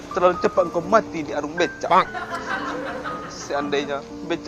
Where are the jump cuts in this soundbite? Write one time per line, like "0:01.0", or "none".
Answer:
none